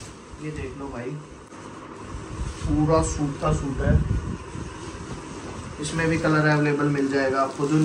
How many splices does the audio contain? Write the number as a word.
zero